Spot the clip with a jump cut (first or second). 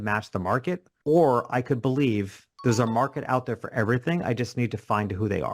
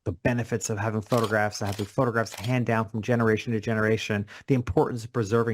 first